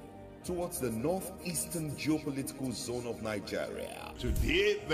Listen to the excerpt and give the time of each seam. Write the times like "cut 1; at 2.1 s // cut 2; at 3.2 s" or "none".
none